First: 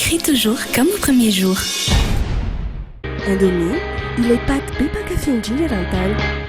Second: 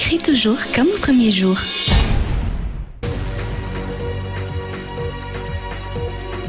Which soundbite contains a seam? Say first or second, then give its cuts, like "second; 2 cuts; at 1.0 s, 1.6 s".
first; 1 cut; at 2.8 s